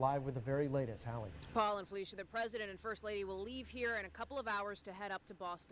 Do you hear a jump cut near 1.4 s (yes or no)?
yes